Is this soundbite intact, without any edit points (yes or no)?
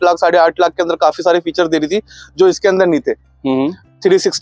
yes